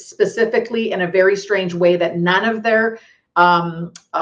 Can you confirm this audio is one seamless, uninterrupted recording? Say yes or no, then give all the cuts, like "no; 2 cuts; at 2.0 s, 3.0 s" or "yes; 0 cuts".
yes; 0 cuts